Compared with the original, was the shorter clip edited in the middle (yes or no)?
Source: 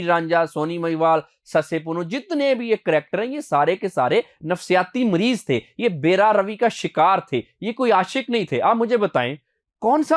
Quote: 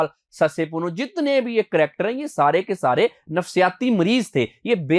no